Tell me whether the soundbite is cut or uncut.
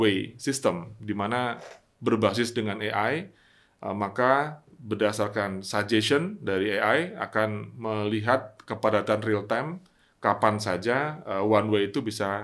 uncut